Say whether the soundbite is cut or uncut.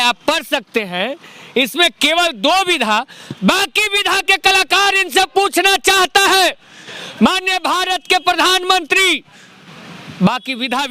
uncut